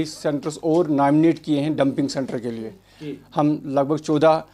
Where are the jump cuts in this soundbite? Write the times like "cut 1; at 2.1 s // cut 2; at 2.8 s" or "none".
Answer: none

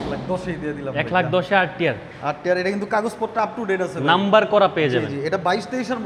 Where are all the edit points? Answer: none

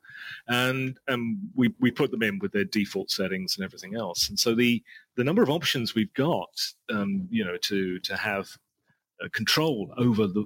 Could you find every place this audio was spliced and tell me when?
none

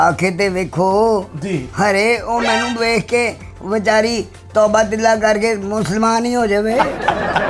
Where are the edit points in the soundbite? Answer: none

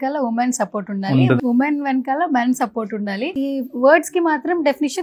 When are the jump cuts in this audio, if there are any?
cut 1; at 1.4 s // cut 2; at 3.3 s

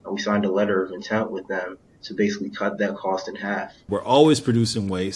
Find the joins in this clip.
cut 1; at 3.8 s

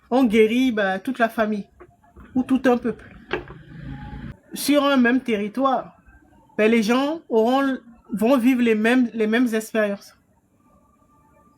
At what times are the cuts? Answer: cut 1; at 4.4 s

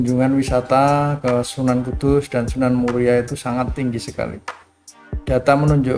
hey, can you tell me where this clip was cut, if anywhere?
none

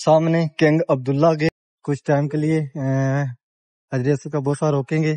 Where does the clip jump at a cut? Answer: cut 1; at 1.5 s

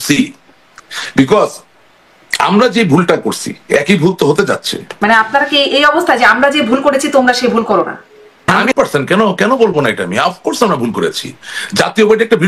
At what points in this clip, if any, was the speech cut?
cut 1; at 4.9 s // cut 2; at 8.6 s

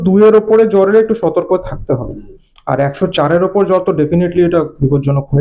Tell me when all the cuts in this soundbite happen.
none

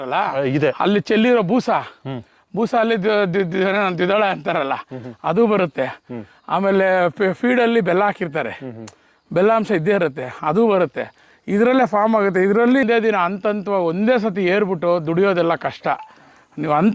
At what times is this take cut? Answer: cut 1; at 12.8 s

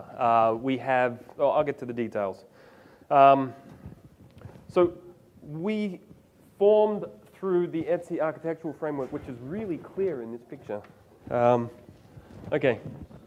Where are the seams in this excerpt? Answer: none

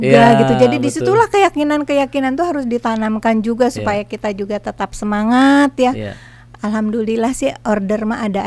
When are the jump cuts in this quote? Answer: none

